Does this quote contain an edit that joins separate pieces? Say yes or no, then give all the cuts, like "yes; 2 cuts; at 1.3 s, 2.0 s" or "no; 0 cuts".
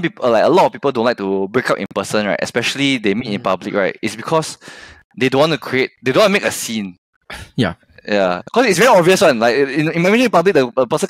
no; 0 cuts